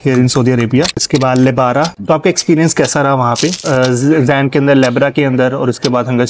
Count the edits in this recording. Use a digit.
3